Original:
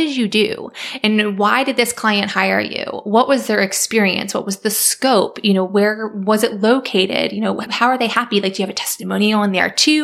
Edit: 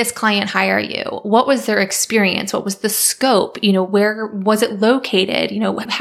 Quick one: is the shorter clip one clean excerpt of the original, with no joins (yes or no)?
yes